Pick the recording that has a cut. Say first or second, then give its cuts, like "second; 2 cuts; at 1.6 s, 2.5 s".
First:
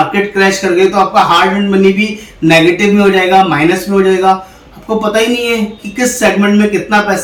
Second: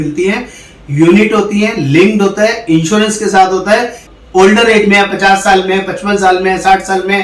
second; 1 cut; at 4.2 s